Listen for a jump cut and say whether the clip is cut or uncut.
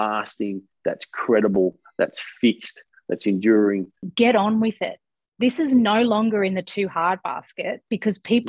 cut